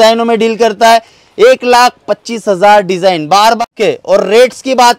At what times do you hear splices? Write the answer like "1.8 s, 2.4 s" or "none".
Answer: 3.6 s